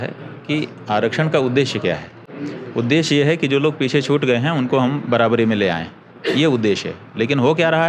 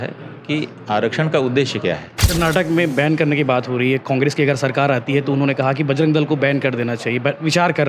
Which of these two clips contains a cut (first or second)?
second